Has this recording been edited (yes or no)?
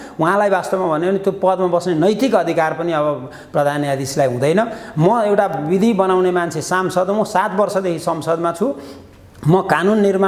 no